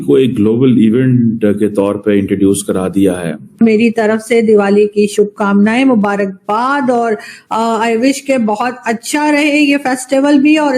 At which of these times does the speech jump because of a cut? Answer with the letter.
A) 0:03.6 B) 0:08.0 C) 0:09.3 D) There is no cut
A